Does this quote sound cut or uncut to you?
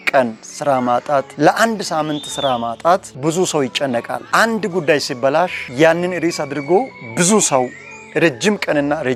uncut